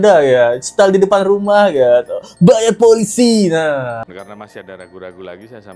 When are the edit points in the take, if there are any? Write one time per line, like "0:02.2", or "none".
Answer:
0:04.0